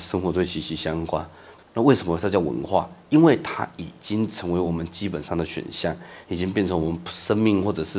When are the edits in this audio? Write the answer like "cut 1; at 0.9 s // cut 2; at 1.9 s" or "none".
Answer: cut 1; at 1.4 s